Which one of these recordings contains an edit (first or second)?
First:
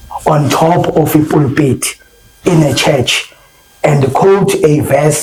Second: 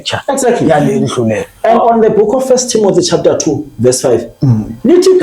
second